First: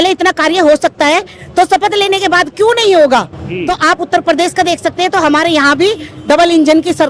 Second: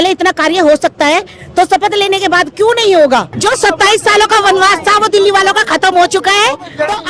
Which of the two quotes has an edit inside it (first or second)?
second